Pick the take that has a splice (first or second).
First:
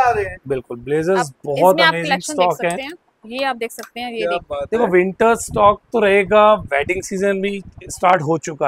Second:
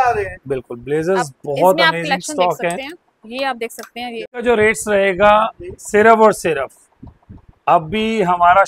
second